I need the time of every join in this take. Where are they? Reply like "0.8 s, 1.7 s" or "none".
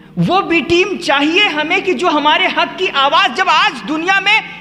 none